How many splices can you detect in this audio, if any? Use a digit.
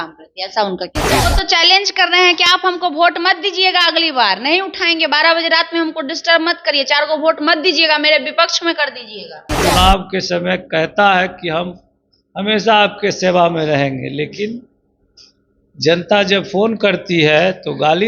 2